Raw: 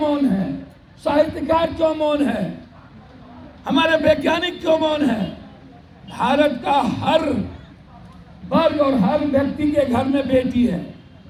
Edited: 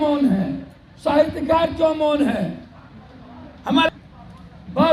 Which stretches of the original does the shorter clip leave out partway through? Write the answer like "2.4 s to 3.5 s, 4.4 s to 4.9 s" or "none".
3.9 s to 7.6 s